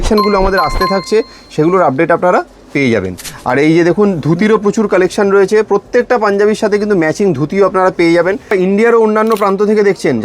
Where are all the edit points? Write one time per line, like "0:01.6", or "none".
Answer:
0:08.5

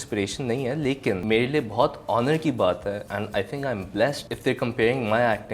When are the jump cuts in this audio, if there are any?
0:01.2
0:03.1
0:04.3

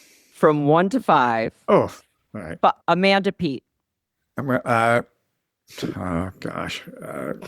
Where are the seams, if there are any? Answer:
0:02.8

